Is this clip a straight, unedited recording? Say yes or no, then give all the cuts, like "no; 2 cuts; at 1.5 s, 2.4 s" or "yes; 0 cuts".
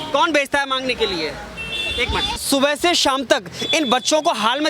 no; 1 cut; at 2.4 s